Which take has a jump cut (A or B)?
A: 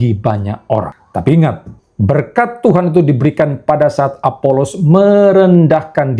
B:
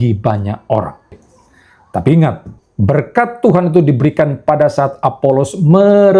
A